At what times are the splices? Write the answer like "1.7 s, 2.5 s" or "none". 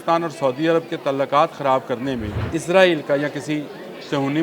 2.4 s